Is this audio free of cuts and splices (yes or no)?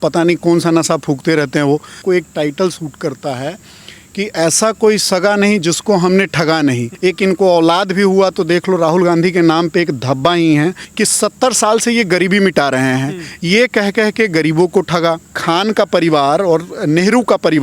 no